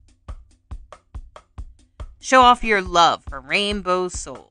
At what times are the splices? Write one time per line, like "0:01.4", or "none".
none